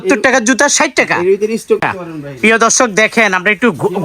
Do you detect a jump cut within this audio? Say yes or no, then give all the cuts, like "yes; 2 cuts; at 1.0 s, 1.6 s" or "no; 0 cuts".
yes; 1 cut; at 1.8 s